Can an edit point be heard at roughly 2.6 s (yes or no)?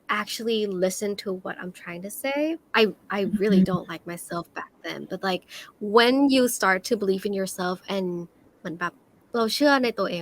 yes